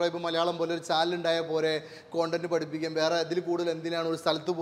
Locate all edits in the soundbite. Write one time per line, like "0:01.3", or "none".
none